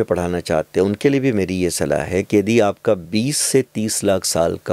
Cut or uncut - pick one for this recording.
uncut